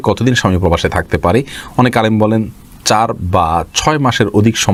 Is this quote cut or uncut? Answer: uncut